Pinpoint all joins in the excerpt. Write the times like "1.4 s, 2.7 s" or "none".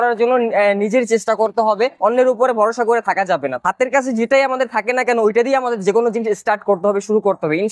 none